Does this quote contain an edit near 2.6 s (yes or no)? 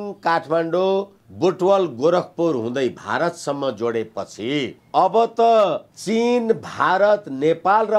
no